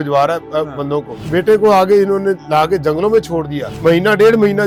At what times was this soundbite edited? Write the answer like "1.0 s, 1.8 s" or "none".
none